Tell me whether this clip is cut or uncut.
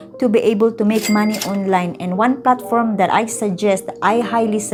uncut